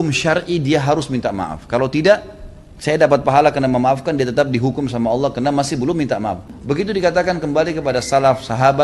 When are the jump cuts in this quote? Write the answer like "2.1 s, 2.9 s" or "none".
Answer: 6.5 s